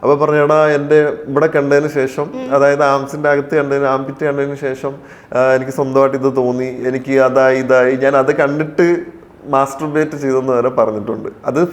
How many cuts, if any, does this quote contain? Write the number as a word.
zero